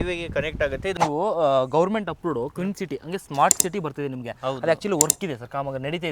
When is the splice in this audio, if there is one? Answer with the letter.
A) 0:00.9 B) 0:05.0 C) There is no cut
A